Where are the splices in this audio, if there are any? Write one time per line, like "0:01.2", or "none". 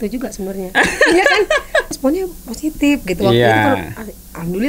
0:01.9